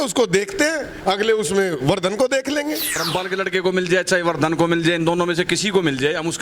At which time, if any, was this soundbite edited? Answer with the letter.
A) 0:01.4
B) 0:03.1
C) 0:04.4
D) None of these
B